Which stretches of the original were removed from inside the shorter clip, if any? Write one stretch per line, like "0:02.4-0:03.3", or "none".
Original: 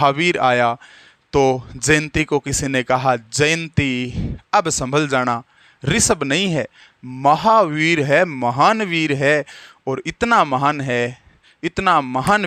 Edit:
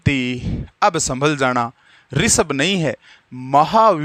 none